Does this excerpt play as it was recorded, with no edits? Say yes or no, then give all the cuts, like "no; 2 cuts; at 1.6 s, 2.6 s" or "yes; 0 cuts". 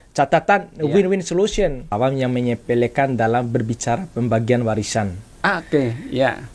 no; 1 cut; at 1.9 s